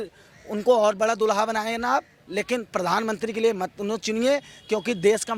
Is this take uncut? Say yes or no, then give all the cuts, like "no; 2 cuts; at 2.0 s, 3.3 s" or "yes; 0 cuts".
yes; 0 cuts